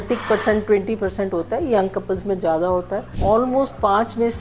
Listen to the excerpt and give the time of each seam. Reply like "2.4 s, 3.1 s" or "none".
3.1 s